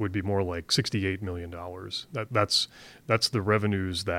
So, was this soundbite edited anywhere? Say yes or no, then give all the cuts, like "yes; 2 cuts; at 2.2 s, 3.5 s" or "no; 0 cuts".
no; 0 cuts